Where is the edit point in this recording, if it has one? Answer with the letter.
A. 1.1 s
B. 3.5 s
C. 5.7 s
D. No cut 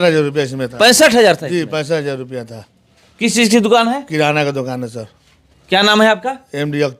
D